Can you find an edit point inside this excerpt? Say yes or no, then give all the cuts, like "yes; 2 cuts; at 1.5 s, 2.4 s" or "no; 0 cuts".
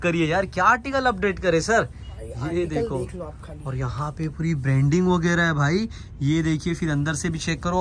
no; 0 cuts